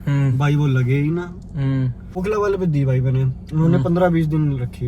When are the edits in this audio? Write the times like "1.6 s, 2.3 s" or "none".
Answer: 2.2 s